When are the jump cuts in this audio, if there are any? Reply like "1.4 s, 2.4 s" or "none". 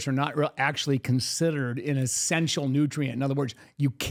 none